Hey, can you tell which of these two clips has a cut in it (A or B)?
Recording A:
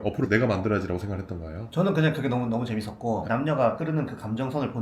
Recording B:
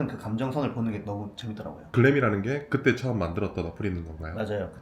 B